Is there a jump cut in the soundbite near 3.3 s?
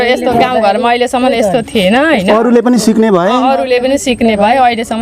no; 0 cuts

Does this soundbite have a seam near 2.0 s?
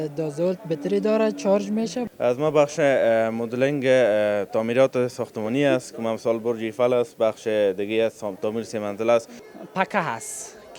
yes; 2 cuts; at 2.0 s, 9.4 s

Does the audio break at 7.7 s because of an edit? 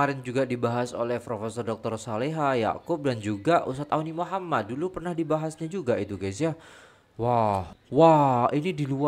yes; 1 cut; at 7.7 s

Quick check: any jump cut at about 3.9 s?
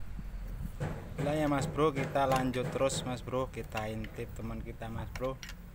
no; 0 cuts

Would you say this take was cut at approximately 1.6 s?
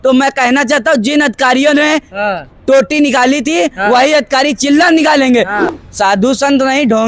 no; 1 cut; at 5.6 s

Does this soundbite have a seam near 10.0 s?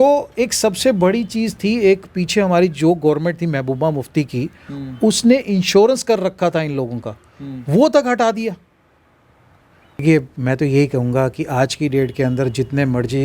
yes; 1 cut; at 10.0 s

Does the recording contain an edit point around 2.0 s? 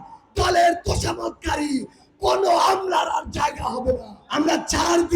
no; 1 cut; at 4.2 s

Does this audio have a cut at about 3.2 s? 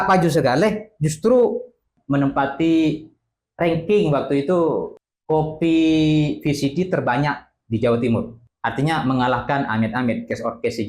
no; 3 cuts; at 1.9 s, 4.9 s, 8.4 s

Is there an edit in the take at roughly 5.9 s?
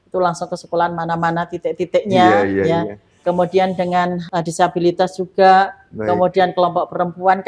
no; 1 cut; at 4.2 s

